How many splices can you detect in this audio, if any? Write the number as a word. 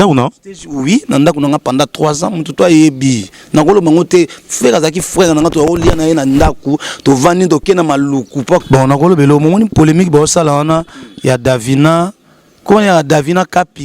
one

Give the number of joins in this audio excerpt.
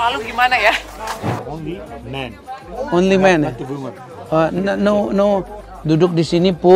two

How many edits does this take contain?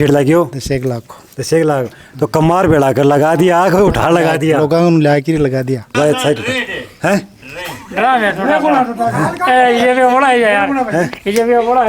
one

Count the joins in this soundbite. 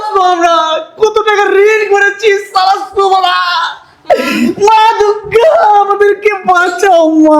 zero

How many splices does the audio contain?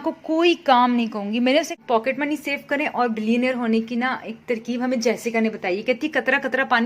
one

